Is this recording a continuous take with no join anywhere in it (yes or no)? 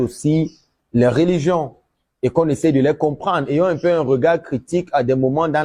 yes